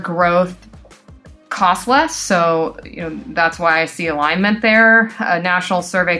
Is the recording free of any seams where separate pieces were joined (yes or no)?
yes